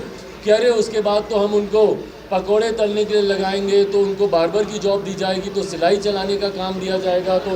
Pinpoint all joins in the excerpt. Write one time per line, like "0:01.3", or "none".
none